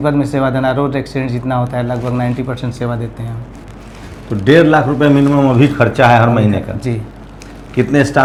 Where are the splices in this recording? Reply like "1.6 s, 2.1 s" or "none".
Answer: none